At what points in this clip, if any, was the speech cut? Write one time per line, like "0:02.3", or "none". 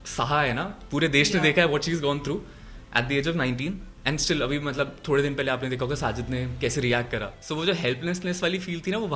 0:07.4